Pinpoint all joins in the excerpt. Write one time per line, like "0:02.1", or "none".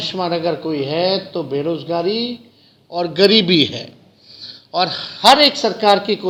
none